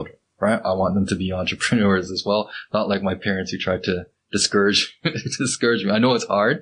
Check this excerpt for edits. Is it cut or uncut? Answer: uncut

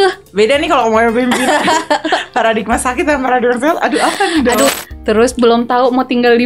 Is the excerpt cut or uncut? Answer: cut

